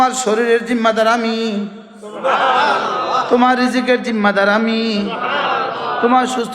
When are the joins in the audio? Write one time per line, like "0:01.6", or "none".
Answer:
none